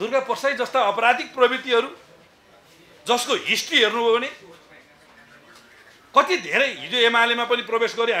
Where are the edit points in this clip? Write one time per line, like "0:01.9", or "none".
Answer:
none